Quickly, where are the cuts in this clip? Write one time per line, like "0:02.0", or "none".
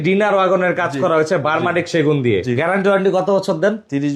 0:02.5

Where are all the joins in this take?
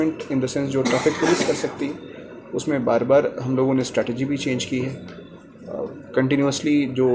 none

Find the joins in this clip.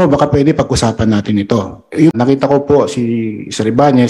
0:02.2

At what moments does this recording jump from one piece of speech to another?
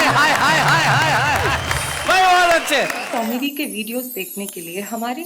0:03.0

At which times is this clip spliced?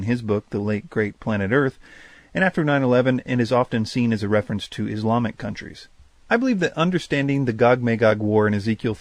0:06.5

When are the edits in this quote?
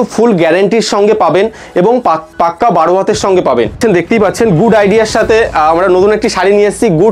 0:03.8

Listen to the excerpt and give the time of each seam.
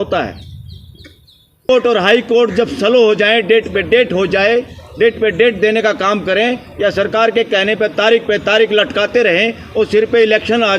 0:01.7

